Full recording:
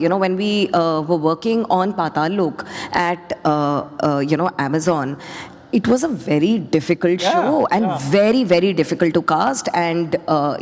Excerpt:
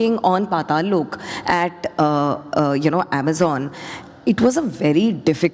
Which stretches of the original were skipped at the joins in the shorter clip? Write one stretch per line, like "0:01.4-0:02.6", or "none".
none

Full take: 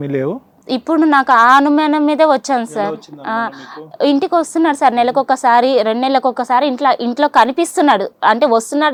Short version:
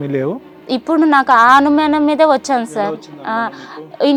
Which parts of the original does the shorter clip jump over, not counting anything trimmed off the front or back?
none

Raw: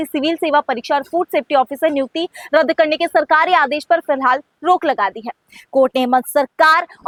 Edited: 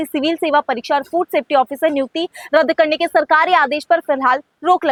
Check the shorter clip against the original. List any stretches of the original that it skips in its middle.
none

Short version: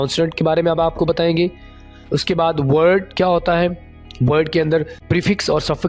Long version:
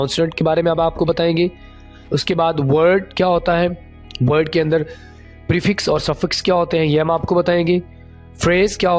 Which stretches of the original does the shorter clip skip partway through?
0:05.0-0:05.4

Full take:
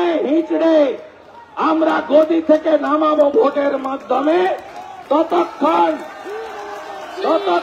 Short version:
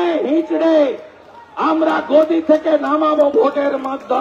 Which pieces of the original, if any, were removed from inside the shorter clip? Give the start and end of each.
none

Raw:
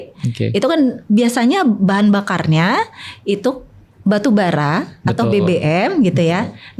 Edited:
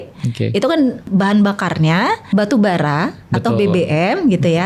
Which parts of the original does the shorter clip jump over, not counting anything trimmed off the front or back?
0:01.1-0:01.8
0:02.9-0:04.0

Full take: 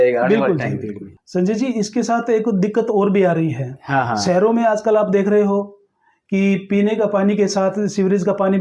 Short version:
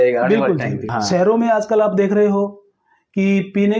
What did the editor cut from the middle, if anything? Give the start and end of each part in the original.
0:00.9-0:04.1

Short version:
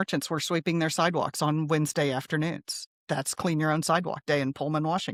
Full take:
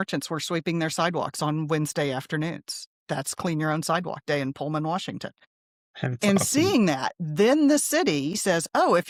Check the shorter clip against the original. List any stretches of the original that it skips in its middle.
none

